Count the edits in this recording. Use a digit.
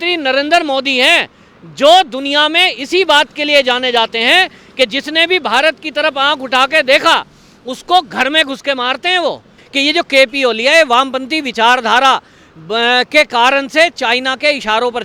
1